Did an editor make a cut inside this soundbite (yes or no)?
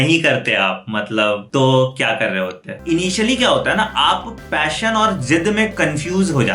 yes